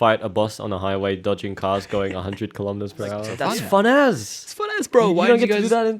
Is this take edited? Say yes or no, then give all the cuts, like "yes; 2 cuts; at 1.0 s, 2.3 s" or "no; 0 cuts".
yes; 1 cut; at 3.3 s